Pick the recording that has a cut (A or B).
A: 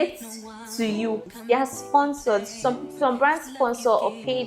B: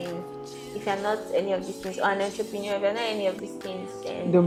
A